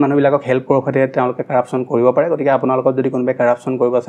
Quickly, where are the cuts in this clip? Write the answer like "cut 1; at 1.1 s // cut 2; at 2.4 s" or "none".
none